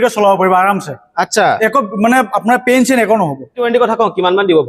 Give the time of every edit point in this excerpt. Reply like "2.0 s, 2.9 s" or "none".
3.6 s